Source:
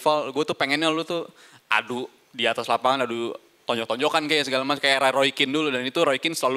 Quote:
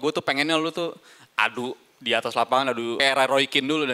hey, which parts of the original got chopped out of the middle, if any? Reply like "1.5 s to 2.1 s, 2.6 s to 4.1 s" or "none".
3.3 s to 4.8 s